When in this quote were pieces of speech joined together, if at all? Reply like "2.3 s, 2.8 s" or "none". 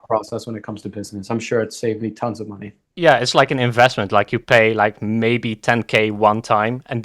3.0 s